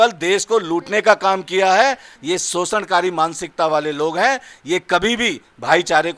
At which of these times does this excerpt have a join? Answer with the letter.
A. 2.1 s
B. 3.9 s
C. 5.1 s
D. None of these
A